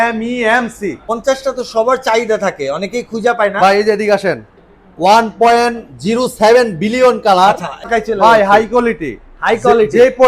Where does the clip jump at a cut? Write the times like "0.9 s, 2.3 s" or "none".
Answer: 1.1 s, 7.8 s